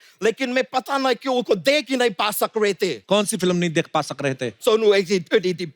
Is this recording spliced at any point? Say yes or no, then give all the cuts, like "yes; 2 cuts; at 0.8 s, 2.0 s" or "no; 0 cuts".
yes; 2 cuts; at 3.0 s, 4.6 s